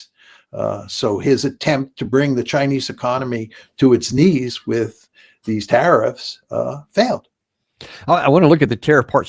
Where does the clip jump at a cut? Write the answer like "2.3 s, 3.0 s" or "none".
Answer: none